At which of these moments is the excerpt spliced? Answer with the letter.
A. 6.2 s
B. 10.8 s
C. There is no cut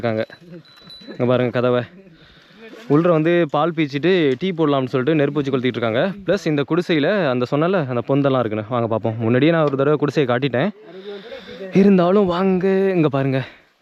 C